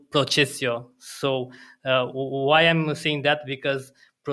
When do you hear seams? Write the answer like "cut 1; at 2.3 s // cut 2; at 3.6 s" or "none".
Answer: none